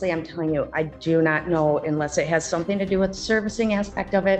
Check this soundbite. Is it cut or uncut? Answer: uncut